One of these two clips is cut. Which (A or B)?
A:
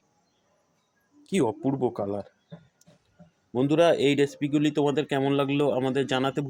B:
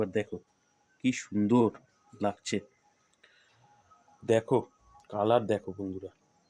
B